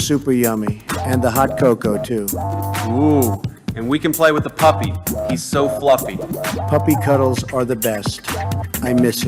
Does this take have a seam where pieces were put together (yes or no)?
no